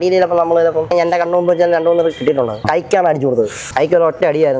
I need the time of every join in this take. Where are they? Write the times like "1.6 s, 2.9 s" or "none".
0.9 s, 2.6 s, 3.7 s